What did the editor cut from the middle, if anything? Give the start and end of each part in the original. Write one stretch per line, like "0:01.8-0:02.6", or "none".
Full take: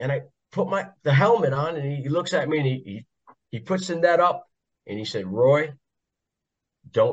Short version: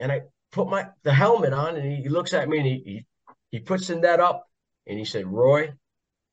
none